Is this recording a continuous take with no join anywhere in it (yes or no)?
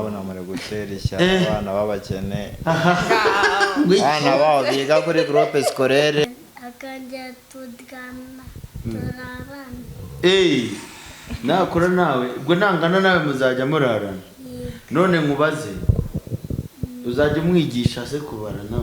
no